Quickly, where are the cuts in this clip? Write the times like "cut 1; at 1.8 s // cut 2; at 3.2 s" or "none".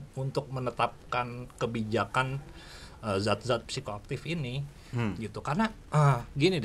none